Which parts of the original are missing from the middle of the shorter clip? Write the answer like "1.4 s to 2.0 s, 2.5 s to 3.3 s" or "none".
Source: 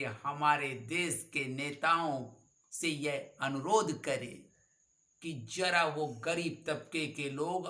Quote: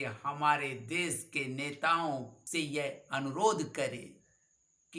2.4 s to 2.7 s